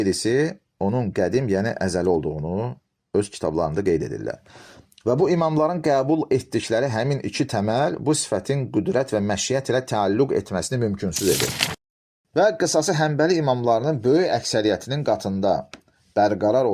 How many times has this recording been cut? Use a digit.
1